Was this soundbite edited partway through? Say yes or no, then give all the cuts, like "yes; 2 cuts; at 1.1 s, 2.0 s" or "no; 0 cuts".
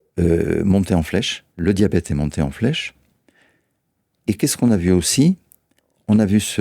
yes; 1 cut; at 1.4 s